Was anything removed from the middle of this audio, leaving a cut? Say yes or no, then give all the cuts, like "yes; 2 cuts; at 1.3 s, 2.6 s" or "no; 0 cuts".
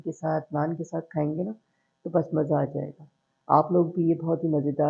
no; 0 cuts